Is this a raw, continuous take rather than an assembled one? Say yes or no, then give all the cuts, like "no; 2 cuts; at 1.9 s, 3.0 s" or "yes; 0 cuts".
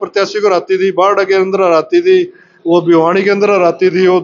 yes; 0 cuts